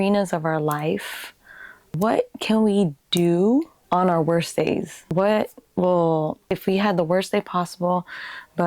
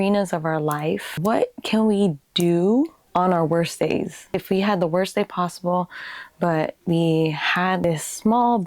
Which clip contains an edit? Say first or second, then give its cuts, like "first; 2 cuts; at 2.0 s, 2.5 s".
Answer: second; 2 cuts; at 1.1 s, 4.2 s